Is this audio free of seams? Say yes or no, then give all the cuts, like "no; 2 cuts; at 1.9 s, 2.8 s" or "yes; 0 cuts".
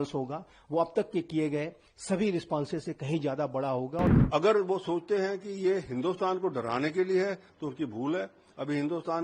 no; 1 cut; at 4.2 s